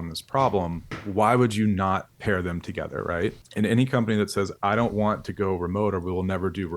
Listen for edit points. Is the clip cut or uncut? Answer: cut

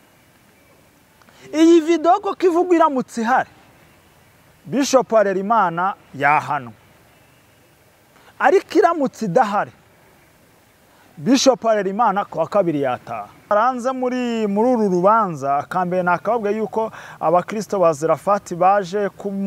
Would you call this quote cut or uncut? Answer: cut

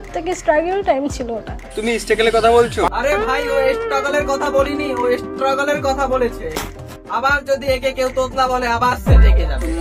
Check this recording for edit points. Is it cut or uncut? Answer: uncut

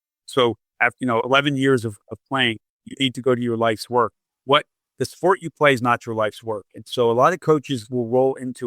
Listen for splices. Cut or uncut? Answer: cut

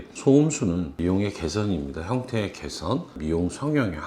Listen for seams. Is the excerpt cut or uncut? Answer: cut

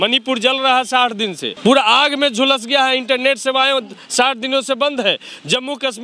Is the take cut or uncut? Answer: cut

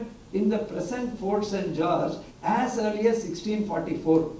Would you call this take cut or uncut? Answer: cut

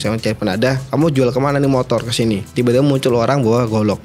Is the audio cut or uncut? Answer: cut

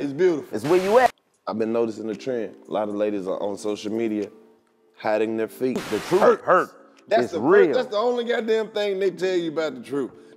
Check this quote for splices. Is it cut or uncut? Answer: cut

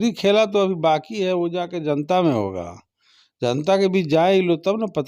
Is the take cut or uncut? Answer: uncut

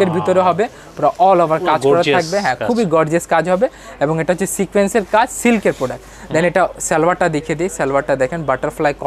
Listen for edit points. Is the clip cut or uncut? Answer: uncut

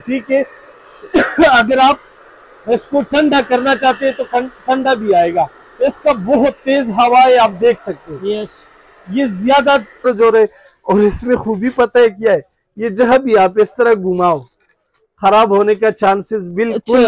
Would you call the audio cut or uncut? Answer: cut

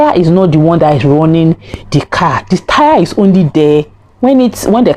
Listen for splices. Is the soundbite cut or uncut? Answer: uncut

